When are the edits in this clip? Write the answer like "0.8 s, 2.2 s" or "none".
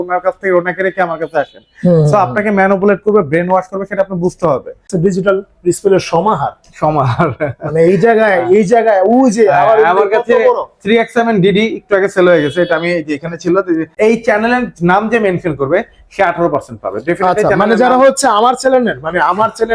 4.9 s, 13.9 s